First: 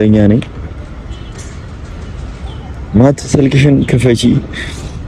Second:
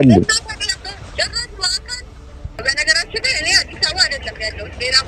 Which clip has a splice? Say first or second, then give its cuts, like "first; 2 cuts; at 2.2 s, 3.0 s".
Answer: second; 1 cut; at 2.5 s